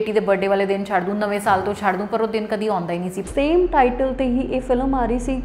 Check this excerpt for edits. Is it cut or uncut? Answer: cut